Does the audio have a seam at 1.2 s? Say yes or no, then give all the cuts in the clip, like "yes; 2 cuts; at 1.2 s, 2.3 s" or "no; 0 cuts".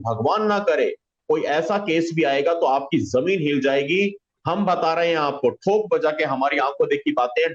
yes; 1 cut; at 1.2 s